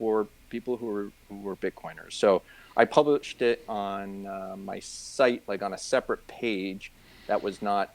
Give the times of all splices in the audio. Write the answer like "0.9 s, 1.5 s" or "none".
none